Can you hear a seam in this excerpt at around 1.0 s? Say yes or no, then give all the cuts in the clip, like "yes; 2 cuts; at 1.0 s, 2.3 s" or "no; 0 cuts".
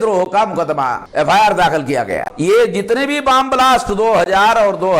yes; 2 cuts; at 1.0 s, 2.3 s